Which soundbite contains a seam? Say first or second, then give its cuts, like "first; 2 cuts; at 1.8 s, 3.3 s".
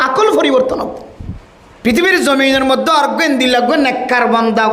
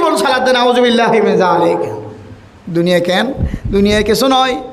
first; 1 cut; at 1.4 s